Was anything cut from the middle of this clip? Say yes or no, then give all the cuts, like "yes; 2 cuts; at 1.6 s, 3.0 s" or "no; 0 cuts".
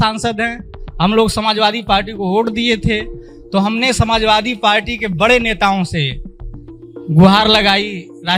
no; 0 cuts